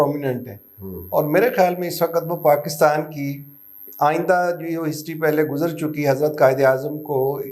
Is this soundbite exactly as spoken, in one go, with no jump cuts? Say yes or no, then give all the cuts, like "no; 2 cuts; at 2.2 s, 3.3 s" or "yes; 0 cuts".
yes; 0 cuts